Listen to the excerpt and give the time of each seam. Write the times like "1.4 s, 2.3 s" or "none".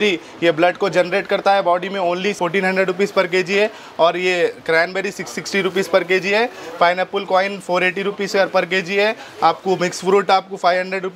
none